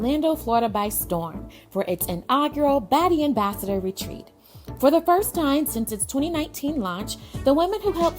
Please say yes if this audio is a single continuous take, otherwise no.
yes